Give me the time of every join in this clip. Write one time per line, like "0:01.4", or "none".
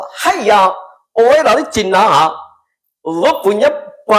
none